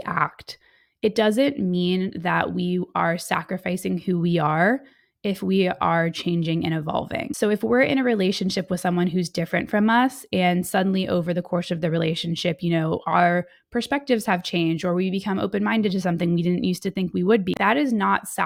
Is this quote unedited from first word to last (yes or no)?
yes